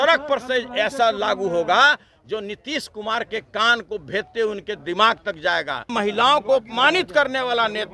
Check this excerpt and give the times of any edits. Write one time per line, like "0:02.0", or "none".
0:05.9